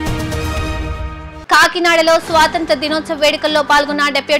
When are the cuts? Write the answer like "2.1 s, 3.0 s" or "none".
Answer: 1.1 s